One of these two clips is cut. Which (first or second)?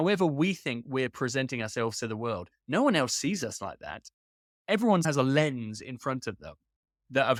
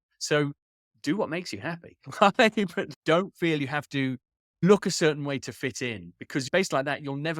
second